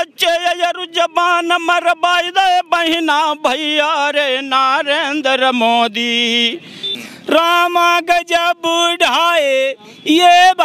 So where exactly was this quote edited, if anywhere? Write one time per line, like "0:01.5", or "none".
0:06.9